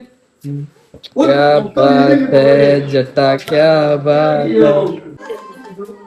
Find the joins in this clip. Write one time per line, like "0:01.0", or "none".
0:05.1